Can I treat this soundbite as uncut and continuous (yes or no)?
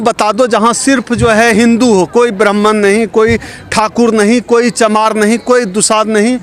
yes